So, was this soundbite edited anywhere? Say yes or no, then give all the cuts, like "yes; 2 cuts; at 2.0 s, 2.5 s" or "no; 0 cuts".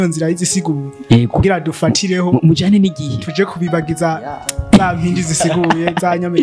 no; 0 cuts